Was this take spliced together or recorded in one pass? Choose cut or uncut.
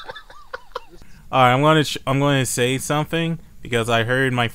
cut